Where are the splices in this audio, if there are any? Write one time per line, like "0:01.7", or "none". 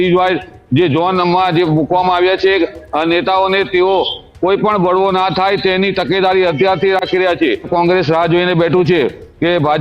0:07.7